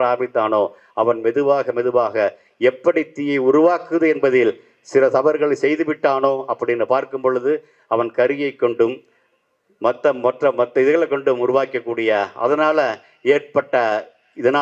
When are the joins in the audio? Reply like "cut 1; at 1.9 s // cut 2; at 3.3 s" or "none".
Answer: none